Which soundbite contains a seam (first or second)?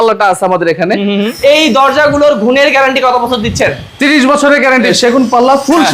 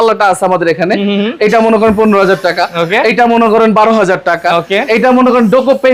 first